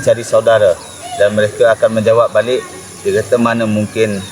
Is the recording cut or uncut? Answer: uncut